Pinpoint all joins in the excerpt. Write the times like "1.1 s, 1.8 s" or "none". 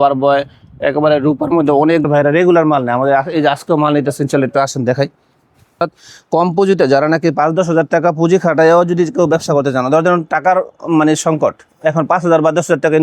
2.0 s, 5.8 s

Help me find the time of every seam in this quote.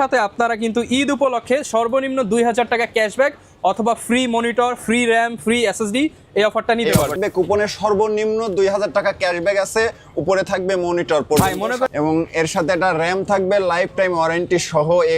7.2 s, 11.9 s

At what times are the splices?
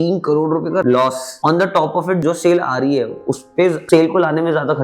0.8 s, 2.2 s

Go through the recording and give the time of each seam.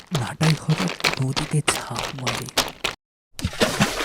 none

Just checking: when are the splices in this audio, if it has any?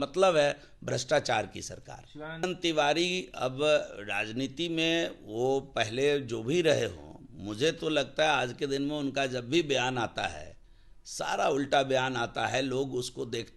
2.5 s

